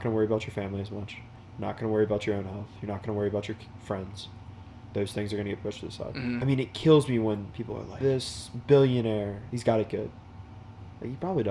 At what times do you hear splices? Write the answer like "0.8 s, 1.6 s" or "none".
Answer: 6.4 s, 7.9 s, 9.4 s